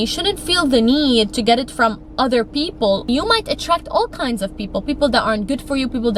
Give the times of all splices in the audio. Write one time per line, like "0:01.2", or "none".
0:03.1